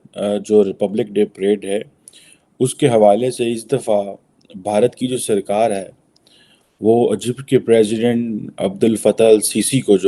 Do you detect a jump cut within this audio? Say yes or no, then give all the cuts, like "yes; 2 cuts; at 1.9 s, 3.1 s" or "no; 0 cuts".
no; 0 cuts